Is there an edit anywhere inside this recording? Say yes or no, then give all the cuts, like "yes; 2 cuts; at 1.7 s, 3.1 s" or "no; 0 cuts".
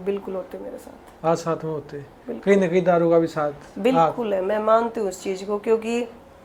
no; 0 cuts